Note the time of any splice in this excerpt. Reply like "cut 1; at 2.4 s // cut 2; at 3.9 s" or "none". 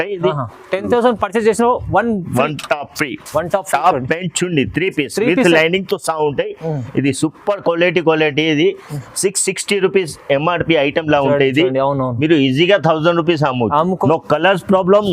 cut 1; at 14.0 s